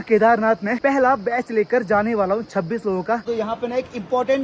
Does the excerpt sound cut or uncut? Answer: cut